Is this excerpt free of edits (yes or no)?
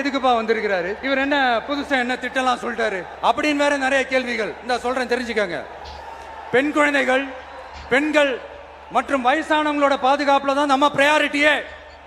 no